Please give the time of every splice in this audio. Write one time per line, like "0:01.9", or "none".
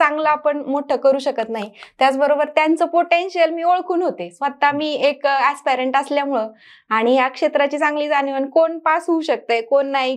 none